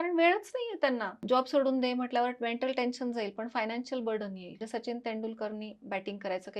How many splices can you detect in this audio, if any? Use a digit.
2